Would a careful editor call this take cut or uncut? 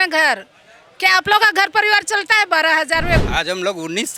cut